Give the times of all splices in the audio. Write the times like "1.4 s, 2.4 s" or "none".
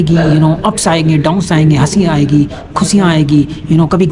none